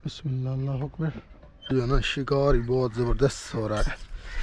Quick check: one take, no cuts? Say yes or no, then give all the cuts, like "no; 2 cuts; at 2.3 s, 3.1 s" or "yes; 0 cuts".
no; 1 cut; at 1.7 s